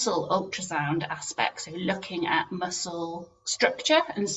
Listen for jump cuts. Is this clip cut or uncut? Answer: uncut